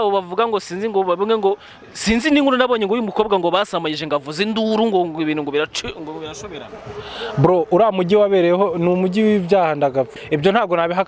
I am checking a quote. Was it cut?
yes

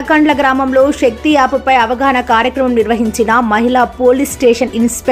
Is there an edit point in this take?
no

